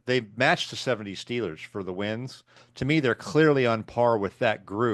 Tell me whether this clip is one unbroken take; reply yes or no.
no